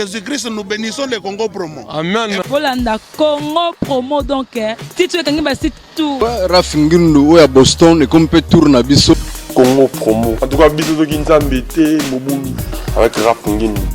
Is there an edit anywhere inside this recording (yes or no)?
yes